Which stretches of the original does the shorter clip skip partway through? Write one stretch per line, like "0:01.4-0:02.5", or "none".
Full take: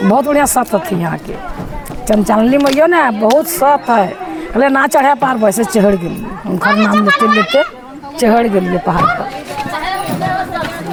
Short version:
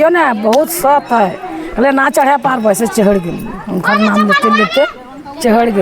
none